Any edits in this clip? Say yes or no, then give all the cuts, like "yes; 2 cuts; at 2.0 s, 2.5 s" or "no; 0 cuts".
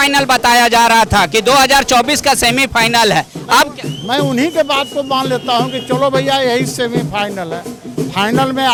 no; 0 cuts